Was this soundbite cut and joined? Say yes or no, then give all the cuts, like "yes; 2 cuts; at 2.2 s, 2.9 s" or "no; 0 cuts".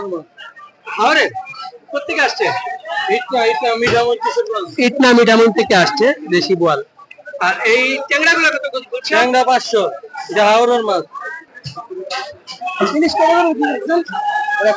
yes; 1 cut; at 11.4 s